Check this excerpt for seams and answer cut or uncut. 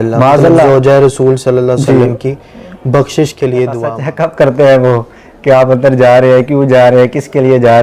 cut